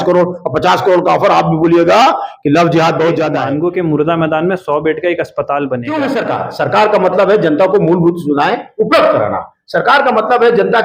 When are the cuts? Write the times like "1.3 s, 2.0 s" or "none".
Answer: 3.4 s, 5.9 s